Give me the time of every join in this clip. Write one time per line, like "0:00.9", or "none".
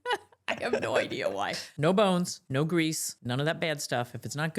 0:01.7
0:02.4
0:03.1